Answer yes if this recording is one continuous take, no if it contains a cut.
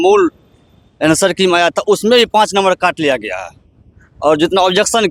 yes